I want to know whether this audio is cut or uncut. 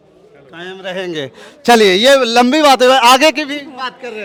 uncut